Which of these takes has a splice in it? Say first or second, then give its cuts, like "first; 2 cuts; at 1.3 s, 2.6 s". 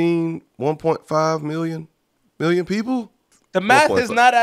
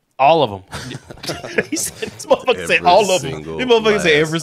first; 1 cut; at 3.3 s